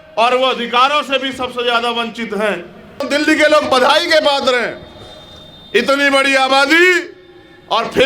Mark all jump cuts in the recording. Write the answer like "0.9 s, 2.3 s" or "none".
3.0 s